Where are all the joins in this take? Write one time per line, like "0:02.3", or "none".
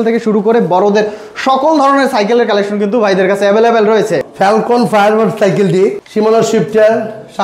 0:04.3
0:06.0